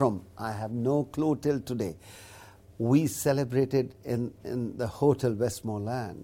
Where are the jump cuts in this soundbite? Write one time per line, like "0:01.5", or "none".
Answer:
none